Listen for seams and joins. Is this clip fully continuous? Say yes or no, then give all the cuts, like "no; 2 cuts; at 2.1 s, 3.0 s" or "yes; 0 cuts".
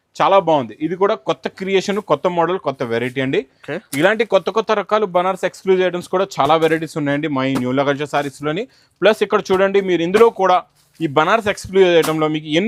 yes; 0 cuts